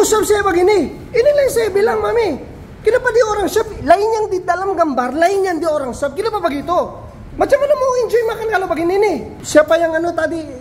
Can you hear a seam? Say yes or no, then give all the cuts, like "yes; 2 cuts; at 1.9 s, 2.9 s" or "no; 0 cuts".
no; 0 cuts